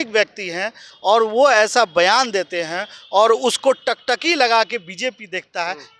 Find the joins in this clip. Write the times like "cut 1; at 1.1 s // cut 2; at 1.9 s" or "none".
none